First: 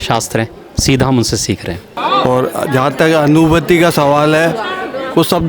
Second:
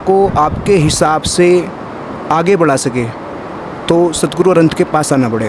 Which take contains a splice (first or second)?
first